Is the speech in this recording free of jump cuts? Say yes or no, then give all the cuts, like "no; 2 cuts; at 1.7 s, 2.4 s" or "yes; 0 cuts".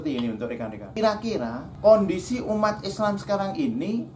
no; 2 cuts; at 0.9 s, 1.6 s